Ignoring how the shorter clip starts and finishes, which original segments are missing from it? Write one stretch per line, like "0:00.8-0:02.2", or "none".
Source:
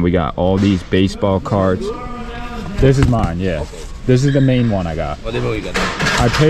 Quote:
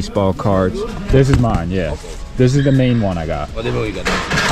0:02.0-0:02.6